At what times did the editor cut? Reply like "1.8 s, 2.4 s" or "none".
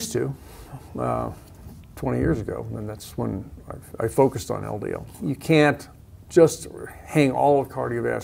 5.1 s